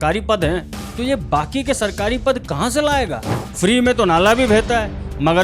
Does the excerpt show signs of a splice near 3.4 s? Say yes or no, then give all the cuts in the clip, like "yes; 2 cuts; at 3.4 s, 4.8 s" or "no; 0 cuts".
yes; 1 cut; at 3.4 s